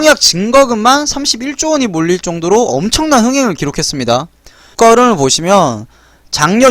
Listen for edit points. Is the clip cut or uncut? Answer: cut